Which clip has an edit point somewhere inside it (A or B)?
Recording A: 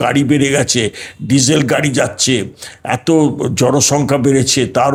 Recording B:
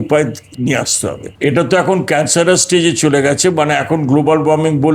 B